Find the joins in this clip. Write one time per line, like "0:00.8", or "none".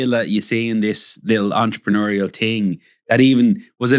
none